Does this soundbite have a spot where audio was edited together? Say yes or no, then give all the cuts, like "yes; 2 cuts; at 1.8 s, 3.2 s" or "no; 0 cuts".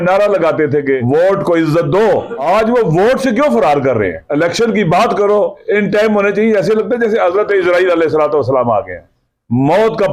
yes; 4 cuts; at 1.0 s, 2.3 s, 4.2 s, 5.6 s